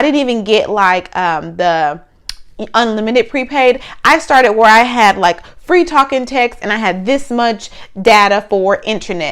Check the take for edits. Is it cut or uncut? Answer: uncut